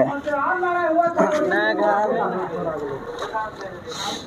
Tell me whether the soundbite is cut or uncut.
cut